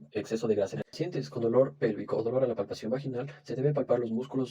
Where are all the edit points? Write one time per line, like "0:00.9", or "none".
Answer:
0:01.0